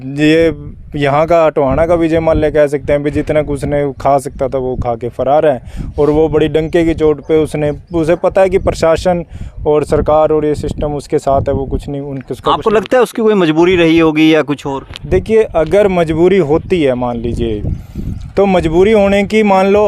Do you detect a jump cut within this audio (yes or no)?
no